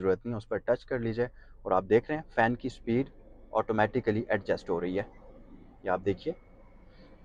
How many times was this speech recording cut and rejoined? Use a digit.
0